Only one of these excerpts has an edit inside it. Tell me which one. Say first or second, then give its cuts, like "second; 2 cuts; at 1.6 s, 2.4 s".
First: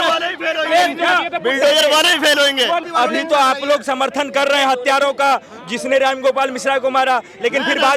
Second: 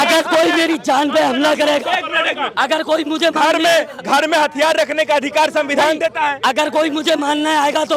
first; 1 cut; at 2.8 s